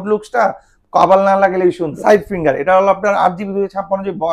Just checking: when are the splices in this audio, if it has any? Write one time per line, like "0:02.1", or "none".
0:02.0